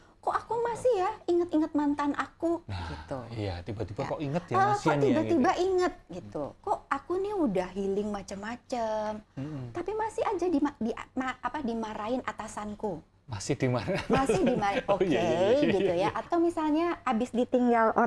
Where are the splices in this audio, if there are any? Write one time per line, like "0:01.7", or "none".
0:06.6
0:16.2